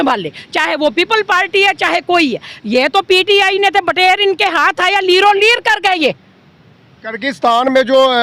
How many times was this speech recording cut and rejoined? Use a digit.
0